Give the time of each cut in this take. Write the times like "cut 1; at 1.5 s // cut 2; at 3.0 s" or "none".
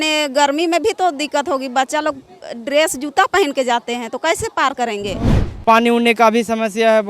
cut 1; at 5.5 s